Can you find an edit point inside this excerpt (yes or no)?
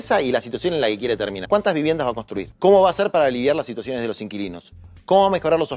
yes